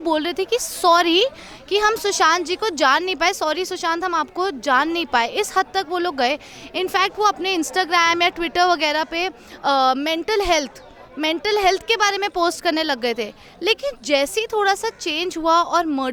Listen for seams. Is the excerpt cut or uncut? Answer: uncut